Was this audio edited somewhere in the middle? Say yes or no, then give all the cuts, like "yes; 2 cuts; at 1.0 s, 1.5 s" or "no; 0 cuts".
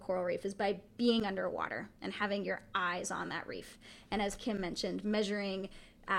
no; 0 cuts